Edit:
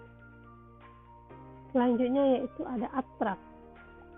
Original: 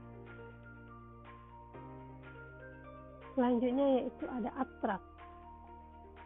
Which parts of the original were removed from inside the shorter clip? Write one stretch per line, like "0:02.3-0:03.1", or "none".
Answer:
0:02.2-0:03.3